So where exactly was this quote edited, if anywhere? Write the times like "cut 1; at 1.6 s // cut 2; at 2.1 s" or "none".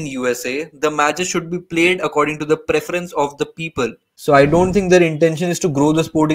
cut 1; at 4.0 s